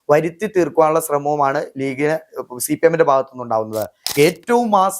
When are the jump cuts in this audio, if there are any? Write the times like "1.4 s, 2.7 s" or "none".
4.0 s